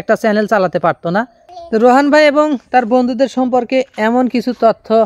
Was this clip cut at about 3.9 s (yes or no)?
no